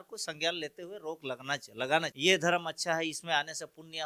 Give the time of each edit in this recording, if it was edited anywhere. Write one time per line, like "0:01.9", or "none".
0:02.1